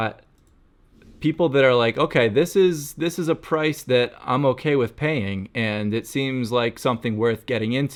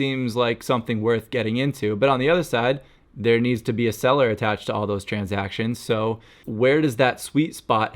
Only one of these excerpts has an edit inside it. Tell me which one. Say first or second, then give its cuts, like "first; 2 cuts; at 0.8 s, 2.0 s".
second; 1 cut; at 6.3 s